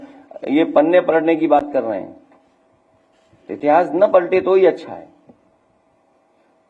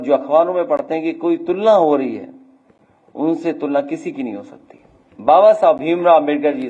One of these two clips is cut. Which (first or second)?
second